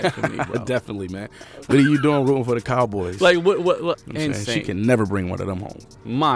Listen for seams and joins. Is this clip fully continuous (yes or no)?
no